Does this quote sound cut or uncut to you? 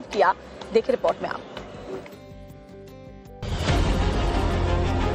cut